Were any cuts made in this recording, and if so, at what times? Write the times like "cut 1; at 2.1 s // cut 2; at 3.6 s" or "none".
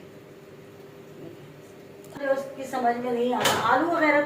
cut 1; at 2.2 s